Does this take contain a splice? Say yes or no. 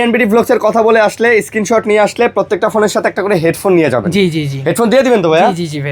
no